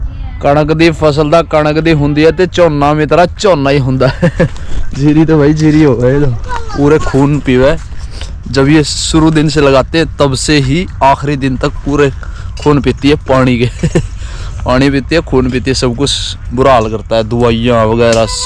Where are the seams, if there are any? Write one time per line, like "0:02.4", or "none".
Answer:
none